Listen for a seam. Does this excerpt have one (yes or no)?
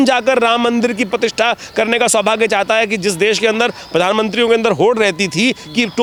no